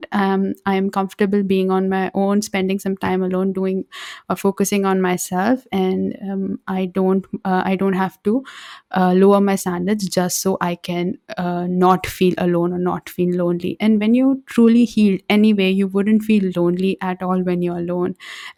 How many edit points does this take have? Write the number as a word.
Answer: zero